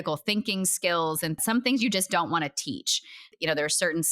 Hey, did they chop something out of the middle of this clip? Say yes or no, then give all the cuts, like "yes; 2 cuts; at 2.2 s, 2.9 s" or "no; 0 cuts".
yes; 2 cuts; at 1.4 s, 3.3 s